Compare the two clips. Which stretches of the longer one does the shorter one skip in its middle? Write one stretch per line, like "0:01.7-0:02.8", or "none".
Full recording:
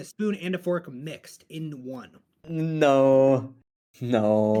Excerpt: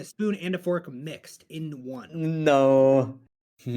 0:02.1-0:02.4